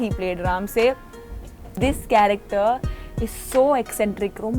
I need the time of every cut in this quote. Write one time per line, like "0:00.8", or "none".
0:01.8